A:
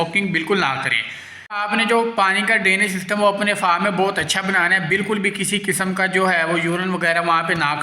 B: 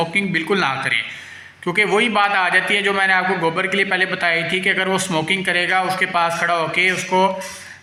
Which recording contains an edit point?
A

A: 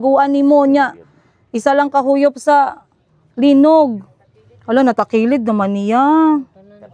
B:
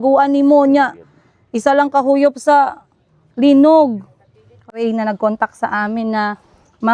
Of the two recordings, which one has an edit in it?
B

